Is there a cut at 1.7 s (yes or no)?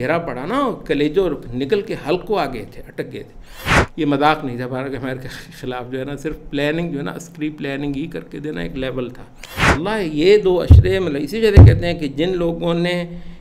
no